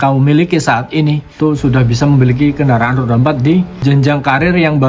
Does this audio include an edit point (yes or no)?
yes